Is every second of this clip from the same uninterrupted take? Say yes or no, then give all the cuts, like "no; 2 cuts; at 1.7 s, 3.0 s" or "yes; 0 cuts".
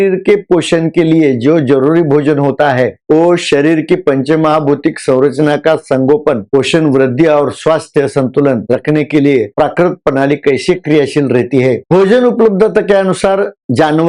yes; 0 cuts